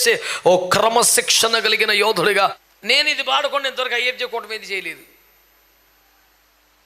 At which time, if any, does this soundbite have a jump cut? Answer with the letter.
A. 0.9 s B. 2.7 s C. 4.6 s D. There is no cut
B